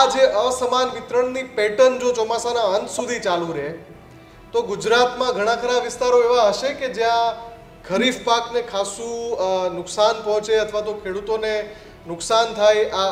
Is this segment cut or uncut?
uncut